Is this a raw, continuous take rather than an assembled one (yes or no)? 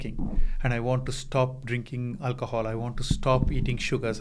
yes